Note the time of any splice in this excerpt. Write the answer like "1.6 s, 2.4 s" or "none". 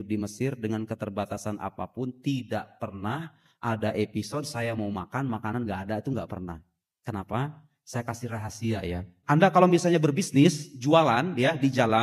9.1 s